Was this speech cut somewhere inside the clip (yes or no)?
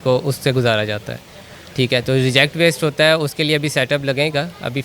no